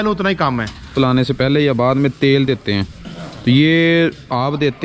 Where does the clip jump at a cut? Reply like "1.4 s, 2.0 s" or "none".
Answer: 0.9 s